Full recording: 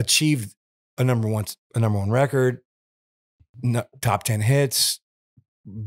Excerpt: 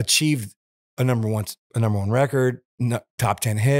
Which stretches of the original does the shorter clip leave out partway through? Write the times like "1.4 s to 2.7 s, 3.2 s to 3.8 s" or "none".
2.7 s to 3.5 s